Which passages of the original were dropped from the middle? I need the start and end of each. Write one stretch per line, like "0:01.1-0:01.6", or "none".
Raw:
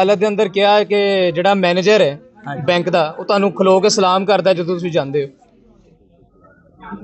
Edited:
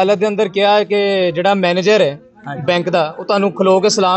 none